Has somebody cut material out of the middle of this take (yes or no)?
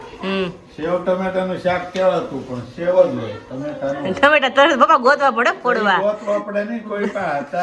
no